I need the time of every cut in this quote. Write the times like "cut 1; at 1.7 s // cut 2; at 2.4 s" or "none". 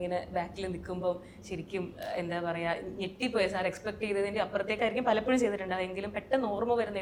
none